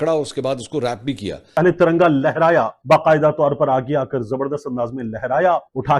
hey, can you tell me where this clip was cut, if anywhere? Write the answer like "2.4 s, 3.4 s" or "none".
1.5 s